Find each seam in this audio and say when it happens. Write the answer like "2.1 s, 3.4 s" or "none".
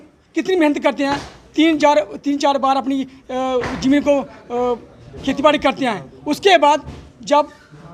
none